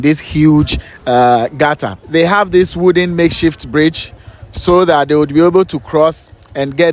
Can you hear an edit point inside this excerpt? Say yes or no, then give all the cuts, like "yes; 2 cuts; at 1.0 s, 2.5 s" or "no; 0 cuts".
yes; 1 cut; at 1.9 s